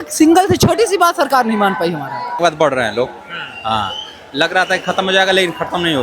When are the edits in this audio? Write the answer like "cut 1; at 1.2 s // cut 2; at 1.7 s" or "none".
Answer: cut 1; at 2.4 s